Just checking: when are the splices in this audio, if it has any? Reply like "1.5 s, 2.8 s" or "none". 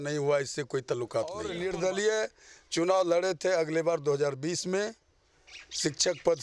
1.5 s